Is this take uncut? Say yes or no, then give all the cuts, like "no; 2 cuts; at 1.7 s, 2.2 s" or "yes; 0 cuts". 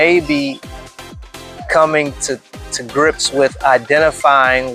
yes; 0 cuts